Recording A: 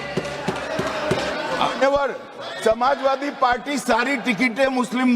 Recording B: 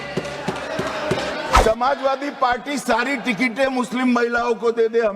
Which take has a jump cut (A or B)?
B